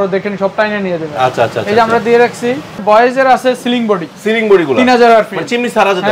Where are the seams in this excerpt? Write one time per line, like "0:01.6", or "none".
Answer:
0:02.8

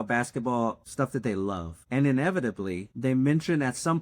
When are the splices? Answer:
0:00.8
0:01.7
0:02.9

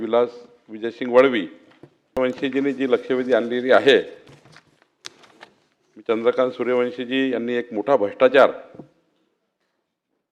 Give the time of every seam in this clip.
0:02.2

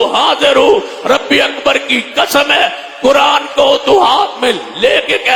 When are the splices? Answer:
none

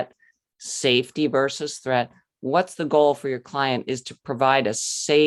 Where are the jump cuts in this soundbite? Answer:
none

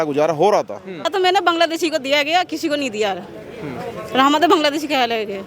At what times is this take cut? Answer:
0:01.1

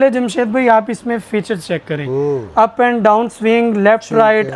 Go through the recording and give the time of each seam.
none

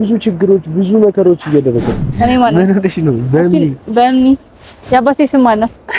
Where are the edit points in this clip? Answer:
0:02.0

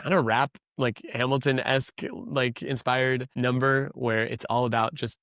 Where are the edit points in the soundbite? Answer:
0:03.3

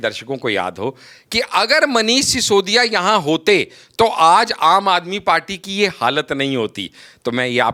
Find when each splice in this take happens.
none

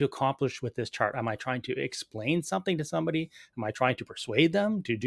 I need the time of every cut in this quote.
none

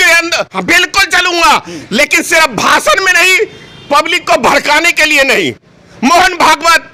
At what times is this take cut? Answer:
none

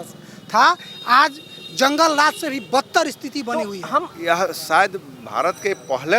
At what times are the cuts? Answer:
0:04.1

